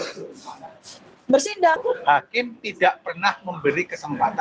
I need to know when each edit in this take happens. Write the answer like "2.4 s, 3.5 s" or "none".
1.8 s